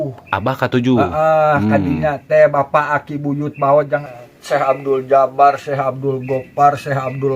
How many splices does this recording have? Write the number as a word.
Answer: one